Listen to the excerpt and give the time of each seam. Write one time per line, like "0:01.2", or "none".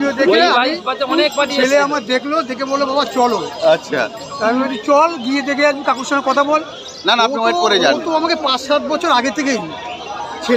none